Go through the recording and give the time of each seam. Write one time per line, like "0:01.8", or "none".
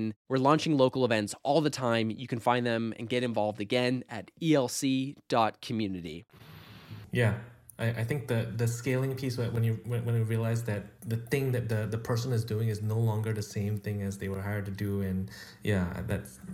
none